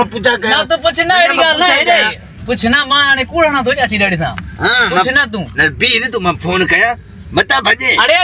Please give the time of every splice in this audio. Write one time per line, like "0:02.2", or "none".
none